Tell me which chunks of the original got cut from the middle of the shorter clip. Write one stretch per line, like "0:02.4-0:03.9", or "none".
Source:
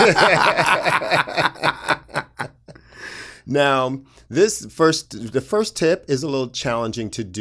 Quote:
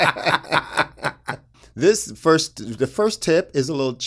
0:02.7-0:04.1